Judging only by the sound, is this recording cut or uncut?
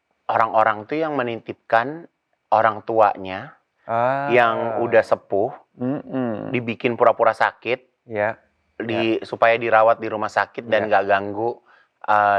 uncut